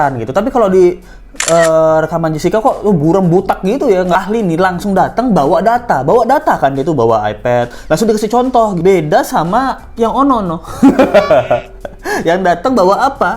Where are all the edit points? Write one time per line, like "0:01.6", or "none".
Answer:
0:04.2
0:08.8